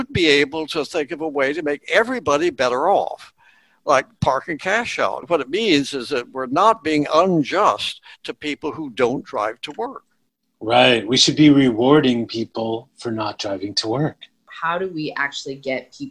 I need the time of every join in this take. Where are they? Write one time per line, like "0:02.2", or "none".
0:05.2
0:14.5